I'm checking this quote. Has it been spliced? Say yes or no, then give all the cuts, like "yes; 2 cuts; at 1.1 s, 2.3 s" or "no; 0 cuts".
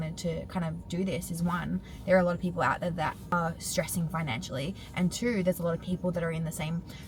no; 0 cuts